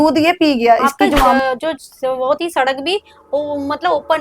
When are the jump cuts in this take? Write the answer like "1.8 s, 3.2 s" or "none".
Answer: 0.9 s